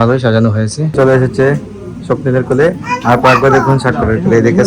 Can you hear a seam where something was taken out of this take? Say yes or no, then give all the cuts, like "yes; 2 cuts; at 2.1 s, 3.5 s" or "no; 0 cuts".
yes; 1 cut; at 1.0 s